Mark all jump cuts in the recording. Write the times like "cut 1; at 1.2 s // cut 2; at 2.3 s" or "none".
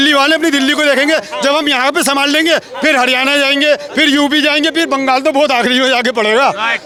none